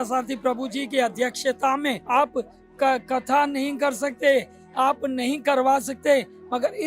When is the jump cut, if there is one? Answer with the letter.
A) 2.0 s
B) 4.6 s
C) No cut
A